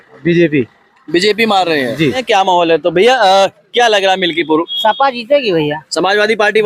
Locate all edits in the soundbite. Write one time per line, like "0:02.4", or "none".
0:02.2